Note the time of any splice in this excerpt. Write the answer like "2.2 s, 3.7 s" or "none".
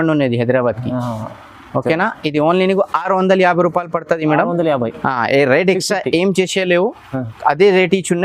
none

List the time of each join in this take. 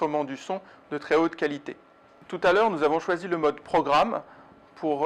none

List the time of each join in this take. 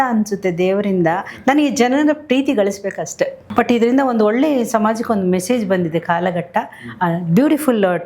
3.4 s

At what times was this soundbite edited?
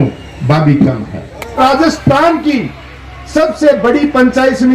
1.6 s

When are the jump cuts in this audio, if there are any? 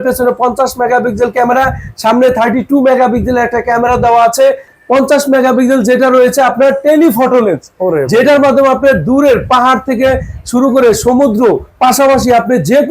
4.7 s

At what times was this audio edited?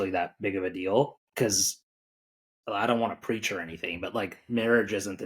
1.2 s

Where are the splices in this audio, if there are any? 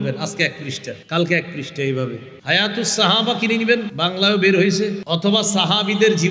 0.9 s, 2.3 s, 3.9 s, 5.0 s

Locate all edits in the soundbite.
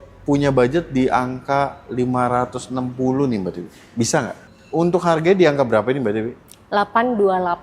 4.4 s

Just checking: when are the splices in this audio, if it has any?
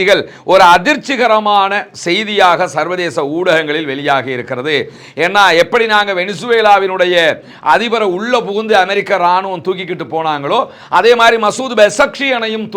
none

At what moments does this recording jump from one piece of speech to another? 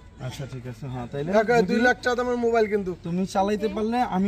none

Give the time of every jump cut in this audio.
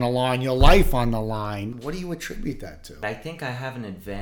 1.7 s, 3.0 s

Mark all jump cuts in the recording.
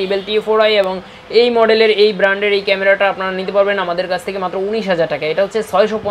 none

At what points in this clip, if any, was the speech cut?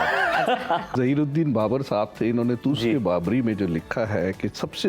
0.9 s

